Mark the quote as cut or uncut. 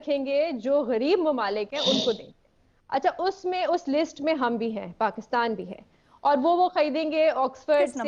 uncut